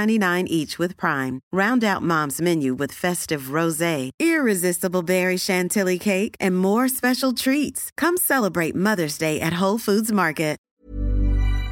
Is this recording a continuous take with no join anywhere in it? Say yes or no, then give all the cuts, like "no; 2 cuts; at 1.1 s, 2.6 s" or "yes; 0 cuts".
no; 1 cut; at 10.7 s